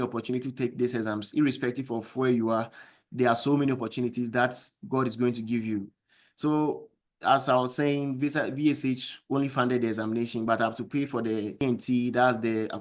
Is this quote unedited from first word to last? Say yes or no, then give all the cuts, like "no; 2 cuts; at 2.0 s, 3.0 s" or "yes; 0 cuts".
no; 1 cut; at 11.6 s